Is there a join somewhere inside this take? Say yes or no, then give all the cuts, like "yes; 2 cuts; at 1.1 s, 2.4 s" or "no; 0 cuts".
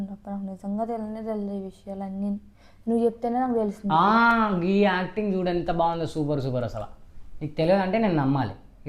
no; 0 cuts